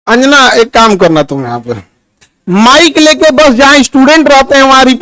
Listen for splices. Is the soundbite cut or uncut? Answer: uncut